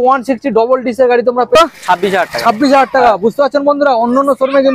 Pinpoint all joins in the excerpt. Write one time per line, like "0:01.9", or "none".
0:01.6

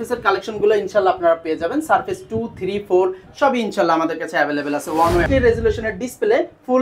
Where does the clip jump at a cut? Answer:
0:05.3

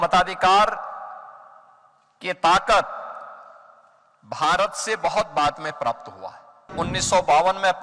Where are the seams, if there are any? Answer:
0:06.7

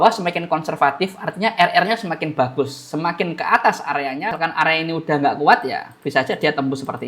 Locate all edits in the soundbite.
0:04.3

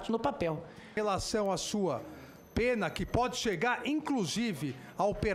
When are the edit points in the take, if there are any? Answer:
0:01.0

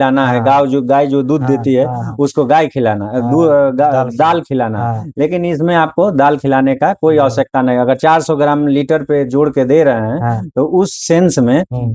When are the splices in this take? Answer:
none

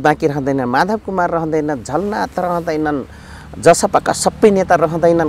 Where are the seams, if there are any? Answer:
none

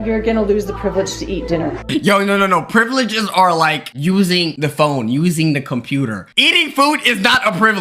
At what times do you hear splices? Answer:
0:01.8
0:06.2

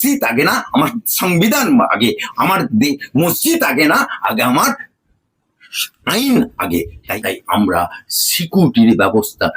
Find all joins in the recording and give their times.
0:07.0

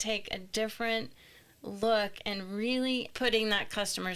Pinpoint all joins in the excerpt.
0:03.1

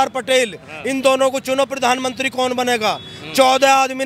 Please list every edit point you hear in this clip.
none

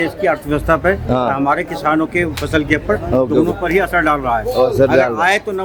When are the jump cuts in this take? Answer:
none

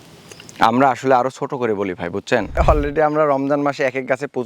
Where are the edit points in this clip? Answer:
0:02.6

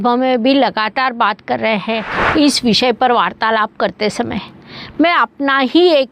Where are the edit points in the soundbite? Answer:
0:02.1

